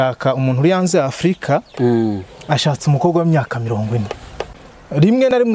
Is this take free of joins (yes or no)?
yes